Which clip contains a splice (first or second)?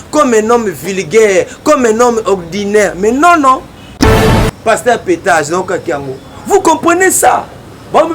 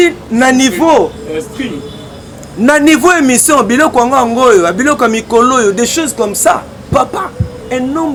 first